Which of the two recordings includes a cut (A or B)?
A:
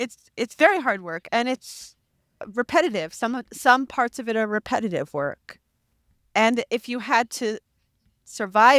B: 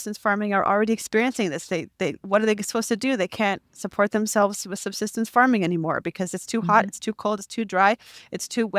A